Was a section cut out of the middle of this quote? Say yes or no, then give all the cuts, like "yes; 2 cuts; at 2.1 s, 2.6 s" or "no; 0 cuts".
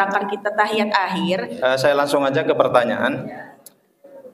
yes; 1 cut; at 1.5 s